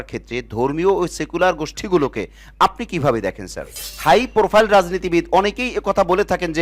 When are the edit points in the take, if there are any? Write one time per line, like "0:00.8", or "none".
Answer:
0:03.9